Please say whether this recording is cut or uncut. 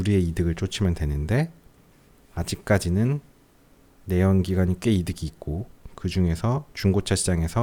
uncut